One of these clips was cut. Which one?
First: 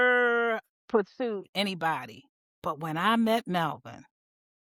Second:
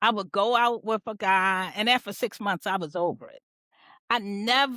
second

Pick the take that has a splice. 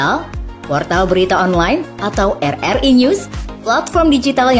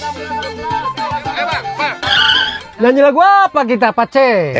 second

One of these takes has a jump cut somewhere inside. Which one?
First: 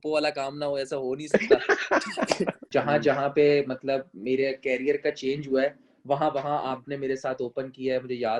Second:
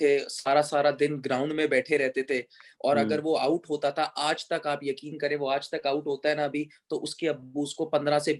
first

